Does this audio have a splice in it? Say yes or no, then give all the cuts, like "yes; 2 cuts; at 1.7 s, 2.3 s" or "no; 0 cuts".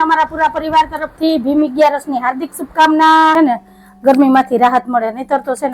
yes; 1 cut; at 3.3 s